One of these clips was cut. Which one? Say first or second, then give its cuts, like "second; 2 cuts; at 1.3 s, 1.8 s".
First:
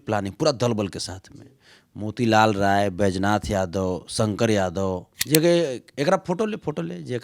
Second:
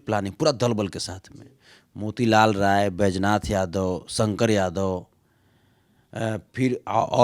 first; 1 cut; at 5.1 s